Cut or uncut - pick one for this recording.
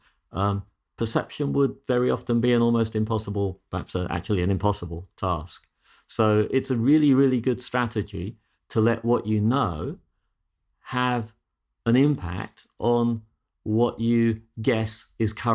uncut